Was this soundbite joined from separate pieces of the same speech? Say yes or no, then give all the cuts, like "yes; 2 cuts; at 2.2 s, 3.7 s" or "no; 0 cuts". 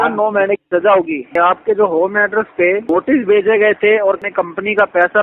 yes; 3 cuts; at 1.3 s, 2.9 s, 4.2 s